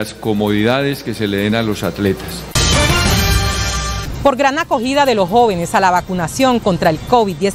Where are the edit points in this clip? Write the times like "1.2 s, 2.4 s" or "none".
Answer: 2.5 s, 4.1 s